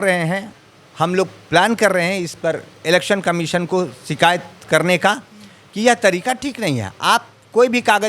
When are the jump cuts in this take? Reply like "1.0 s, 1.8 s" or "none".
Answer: none